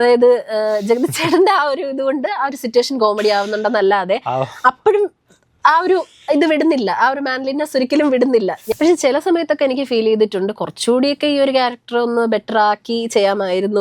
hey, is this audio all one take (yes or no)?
no